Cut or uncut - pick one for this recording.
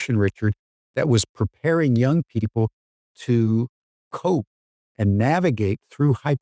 uncut